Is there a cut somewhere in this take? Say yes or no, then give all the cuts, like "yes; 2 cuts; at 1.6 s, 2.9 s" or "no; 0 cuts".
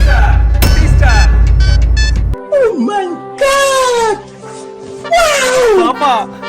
yes; 1 cut; at 2.3 s